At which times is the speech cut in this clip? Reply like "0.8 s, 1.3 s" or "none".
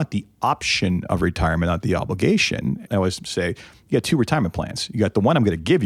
2.8 s